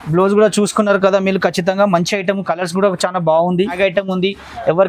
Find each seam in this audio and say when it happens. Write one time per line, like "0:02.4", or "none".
0:03.8